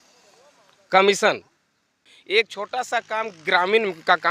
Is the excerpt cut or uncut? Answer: cut